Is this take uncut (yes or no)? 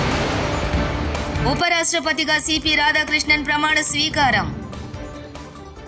yes